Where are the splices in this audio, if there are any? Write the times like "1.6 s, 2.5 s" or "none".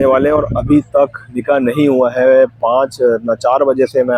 none